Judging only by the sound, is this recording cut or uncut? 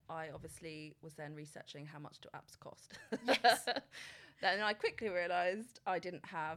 uncut